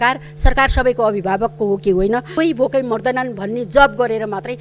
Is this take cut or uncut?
cut